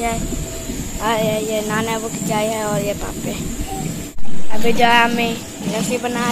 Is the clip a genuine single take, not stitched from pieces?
no; 1 cut; at 4.1 s

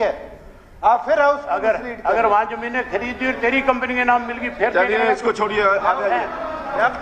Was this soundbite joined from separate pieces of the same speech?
no; 0 cuts

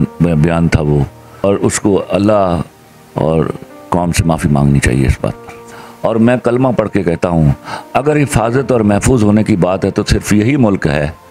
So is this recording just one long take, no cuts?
no; 2 cuts; at 1.4 s, 5.5 s

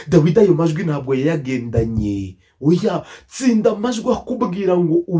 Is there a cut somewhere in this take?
no; 0 cuts

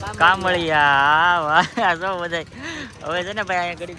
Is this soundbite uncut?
yes; 0 cuts

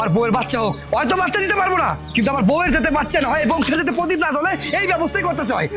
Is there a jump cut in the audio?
no; 0 cuts

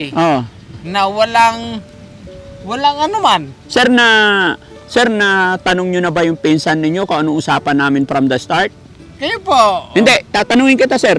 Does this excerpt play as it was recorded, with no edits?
yes; 0 cuts

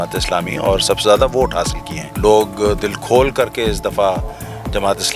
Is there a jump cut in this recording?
yes; 1 cut; at 2.1 s

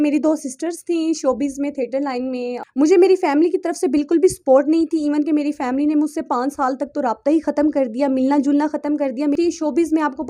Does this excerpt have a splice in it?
yes; 2 cuts; at 2.6 s, 9.4 s

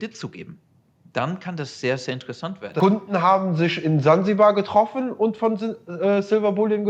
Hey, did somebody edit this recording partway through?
yes; 1 cut; at 2.6 s

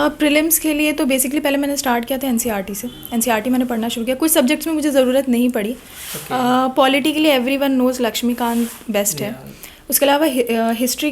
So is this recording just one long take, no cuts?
yes; 0 cuts

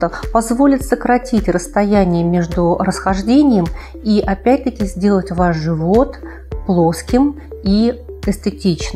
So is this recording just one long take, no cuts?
yes; 0 cuts

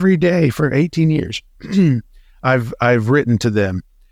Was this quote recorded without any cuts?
yes; 0 cuts

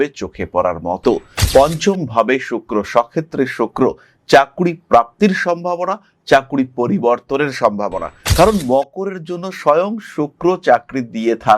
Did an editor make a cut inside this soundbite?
yes; 1 cut; at 1.3 s

